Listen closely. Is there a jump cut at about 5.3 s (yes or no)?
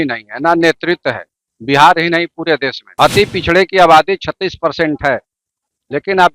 no